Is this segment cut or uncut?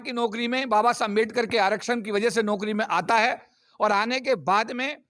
uncut